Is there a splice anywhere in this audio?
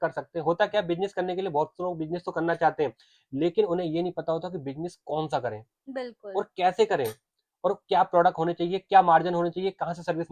no; 0 cuts

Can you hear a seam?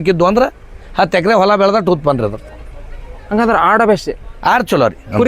no; 0 cuts

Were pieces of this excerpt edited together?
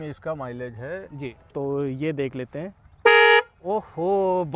yes; 1 cut; at 1.2 s

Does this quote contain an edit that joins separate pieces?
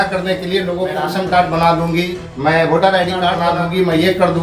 yes; 3 cuts; at 1.0 s, 2.1 s, 3.5 s

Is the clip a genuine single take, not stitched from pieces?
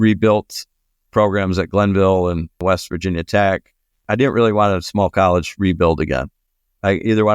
no; 3 cuts; at 1.1 s, 2.6 s, 4.0 s

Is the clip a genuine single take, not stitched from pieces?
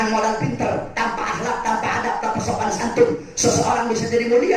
yes; 0 cuts

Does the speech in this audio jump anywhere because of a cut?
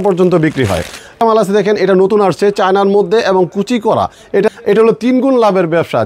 yes; 2 cuts; at 1.2 s, 4.5 s

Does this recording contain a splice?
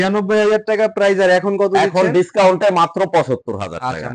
no; 0 cuts

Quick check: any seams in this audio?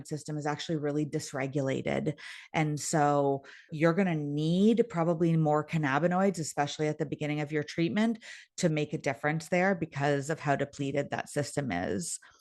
no; 0 cuts

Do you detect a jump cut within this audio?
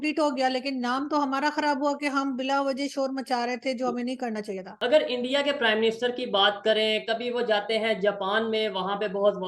yes; 1 cut; at 4.7 s

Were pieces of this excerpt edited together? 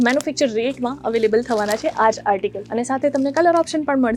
yes; 1 cut; at 2.6 s

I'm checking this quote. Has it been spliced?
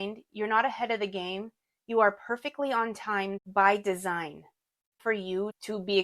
yes; 2 cuts; at 3.4 s, 5.0 s

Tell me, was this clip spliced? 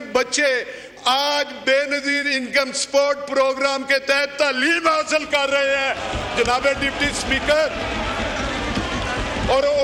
no; 0 cuts

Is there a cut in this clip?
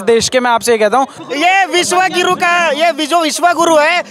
yes; 1 cut; at 1.2 s

